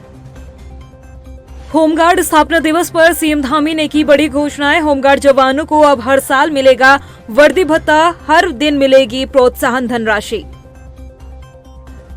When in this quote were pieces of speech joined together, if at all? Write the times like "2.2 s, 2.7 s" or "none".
1.3 s